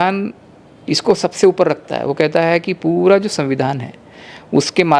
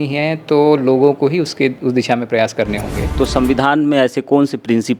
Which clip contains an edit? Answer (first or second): second